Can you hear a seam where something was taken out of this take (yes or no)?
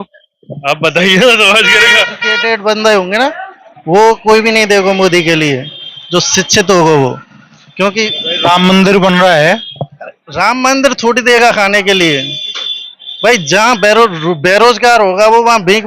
yes